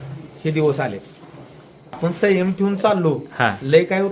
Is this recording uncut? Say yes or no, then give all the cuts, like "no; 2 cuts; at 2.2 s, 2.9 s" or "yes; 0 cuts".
no; 1 cut; at 2.0 s